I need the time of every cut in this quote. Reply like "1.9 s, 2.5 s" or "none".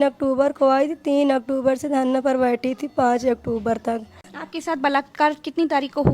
4.3 s